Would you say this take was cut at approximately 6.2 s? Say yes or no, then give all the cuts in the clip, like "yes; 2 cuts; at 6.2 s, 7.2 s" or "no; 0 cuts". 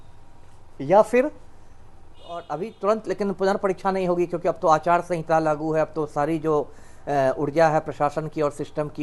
no; 1 cut; at 2.4 s